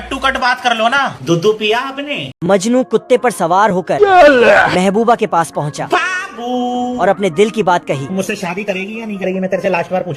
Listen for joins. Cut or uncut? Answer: cut